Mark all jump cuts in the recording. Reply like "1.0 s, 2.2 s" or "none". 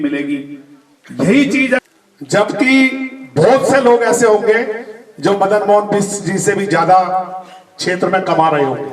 1.8 s